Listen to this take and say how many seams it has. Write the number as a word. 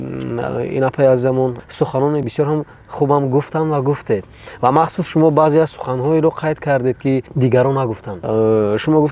three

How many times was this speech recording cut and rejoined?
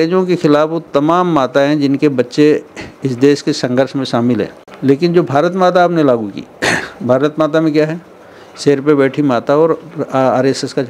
one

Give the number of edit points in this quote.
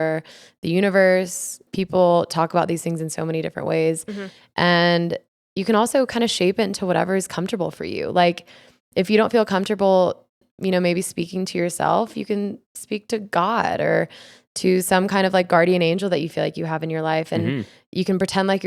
one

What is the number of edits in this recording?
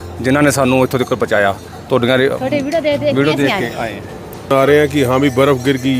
one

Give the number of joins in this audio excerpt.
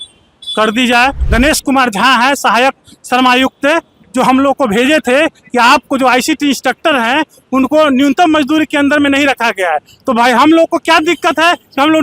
one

